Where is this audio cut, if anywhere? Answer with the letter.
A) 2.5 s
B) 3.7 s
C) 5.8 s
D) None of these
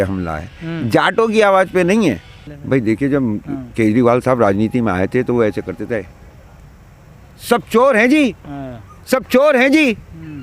A